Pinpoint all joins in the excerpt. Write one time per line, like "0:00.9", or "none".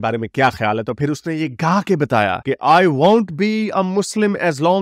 none

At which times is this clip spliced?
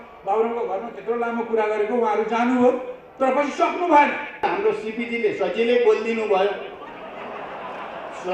0:04.4

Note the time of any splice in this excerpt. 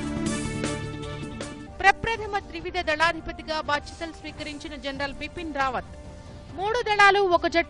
0:01.6

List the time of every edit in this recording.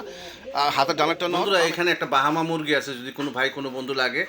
0:01.4

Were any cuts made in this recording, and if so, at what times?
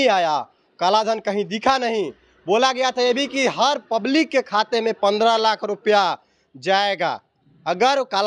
none

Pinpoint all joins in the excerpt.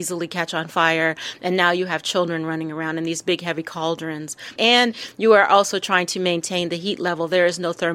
0:04.5

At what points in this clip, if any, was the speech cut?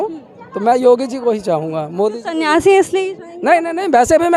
none

